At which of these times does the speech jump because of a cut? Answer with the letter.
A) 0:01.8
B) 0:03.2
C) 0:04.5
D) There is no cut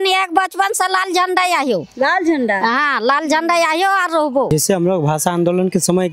C